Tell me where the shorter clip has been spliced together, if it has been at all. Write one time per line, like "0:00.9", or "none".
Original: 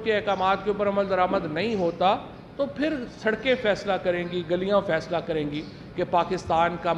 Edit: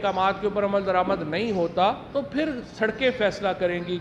0:02.0